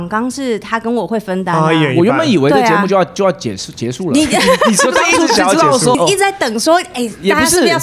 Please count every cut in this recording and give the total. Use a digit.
1